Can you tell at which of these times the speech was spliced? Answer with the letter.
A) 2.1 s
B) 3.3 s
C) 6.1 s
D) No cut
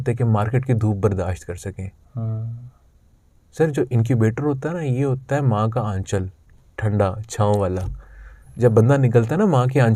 D